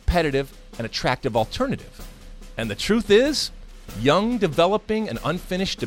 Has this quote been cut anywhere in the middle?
no; 0 cuts

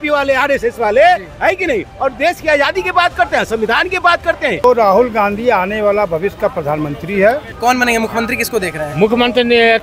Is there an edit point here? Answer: yes; 2 cuts; at 4.6 s, 7.5 s

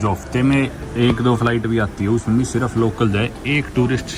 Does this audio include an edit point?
no; 0 cuts

